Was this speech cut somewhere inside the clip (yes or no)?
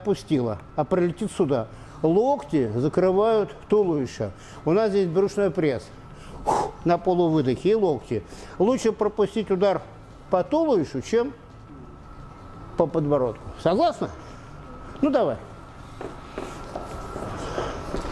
no